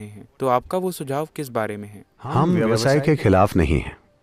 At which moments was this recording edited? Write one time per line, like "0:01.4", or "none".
0:02.6